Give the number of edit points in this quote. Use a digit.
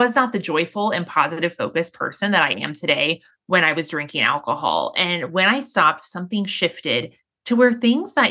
0